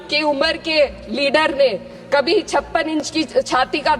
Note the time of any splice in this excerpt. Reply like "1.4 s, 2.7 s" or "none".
none